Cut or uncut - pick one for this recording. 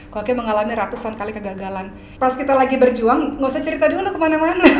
cut